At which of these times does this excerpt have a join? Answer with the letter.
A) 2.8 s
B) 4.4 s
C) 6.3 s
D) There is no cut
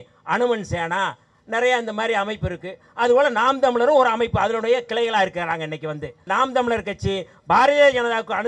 C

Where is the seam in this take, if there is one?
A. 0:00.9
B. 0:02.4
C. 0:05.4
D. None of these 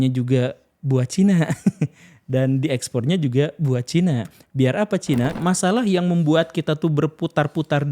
C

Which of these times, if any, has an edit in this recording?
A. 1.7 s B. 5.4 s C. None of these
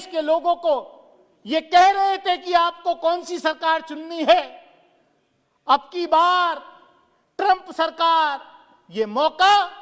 C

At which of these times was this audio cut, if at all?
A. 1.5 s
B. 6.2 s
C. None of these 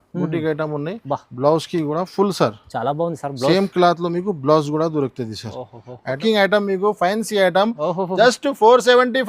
B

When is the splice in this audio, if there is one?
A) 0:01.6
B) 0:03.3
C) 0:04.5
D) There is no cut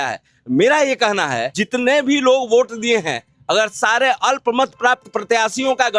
A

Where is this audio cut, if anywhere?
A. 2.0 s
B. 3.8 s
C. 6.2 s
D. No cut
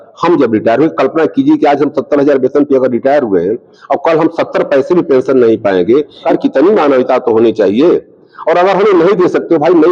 C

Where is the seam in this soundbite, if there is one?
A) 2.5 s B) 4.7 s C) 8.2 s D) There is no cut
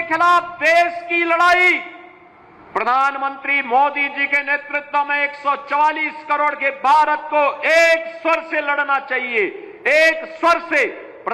D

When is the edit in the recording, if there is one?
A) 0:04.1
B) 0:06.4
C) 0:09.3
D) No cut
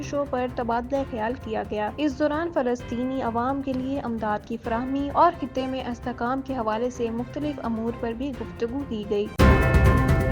C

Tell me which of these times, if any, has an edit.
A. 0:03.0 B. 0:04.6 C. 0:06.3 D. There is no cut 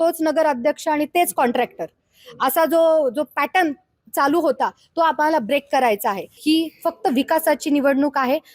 C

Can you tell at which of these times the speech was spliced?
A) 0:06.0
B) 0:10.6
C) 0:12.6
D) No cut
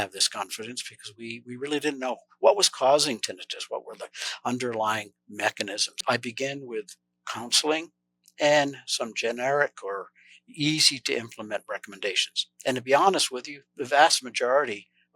A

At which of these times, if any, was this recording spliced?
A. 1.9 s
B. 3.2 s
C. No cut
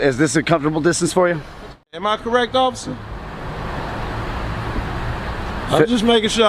A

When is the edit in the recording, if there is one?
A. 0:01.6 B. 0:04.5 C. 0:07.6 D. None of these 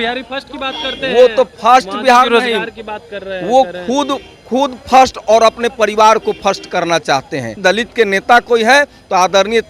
C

